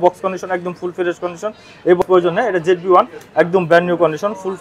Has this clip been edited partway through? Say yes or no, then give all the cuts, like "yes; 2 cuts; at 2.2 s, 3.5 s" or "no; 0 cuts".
yes; 1 cut; at 2.0 s